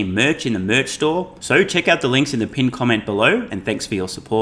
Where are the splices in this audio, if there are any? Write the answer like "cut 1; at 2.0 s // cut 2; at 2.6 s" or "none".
cut 1; at 1.4 s